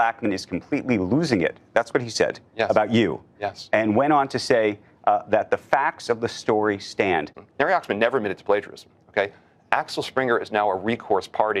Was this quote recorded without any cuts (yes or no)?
no